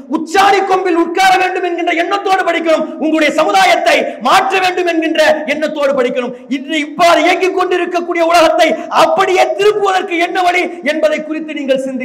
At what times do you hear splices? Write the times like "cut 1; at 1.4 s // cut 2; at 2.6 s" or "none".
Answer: none